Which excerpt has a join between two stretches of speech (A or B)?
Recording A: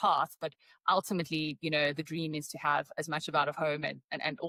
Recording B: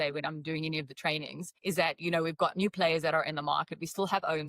B